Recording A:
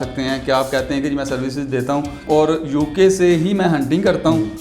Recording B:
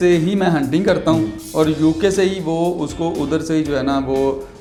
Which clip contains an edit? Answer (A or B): A